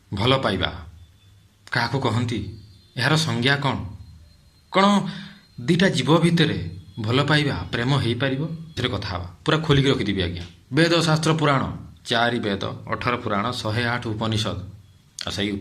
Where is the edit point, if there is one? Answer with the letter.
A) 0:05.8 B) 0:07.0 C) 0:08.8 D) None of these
C